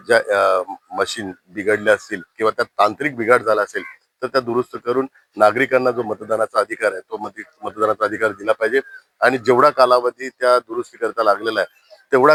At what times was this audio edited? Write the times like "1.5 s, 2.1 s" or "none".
none